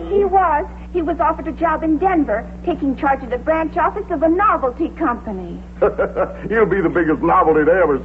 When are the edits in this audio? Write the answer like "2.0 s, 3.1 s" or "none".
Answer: none